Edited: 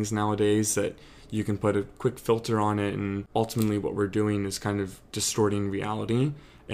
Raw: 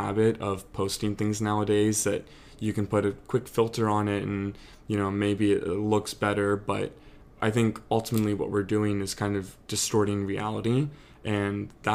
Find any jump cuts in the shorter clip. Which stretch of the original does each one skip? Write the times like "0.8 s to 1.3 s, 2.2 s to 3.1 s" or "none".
4.5 s to 7.8 s